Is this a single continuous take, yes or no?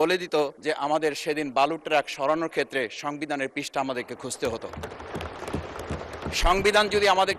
yes